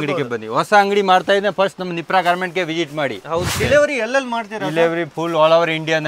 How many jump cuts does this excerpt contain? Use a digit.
1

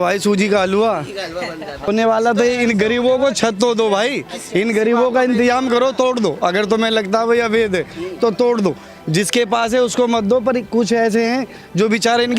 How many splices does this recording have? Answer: 1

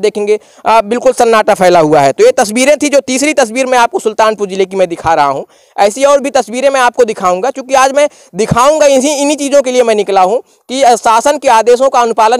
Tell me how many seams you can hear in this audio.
0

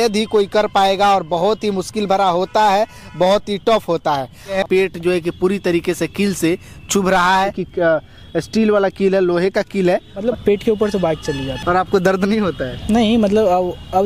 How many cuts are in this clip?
4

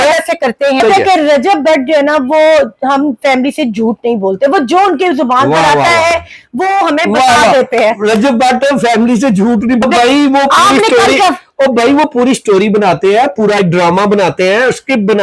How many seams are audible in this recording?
2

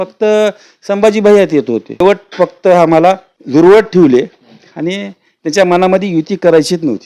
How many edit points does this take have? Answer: 2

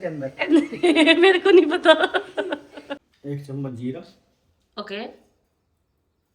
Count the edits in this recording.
1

